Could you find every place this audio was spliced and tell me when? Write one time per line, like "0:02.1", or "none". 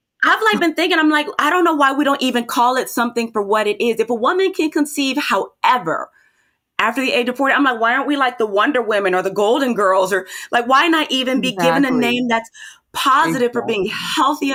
none